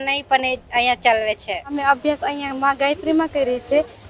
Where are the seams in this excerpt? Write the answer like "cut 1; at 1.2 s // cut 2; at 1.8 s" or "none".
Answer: cut 1; at 1.7 s